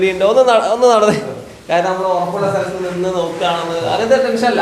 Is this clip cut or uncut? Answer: uncut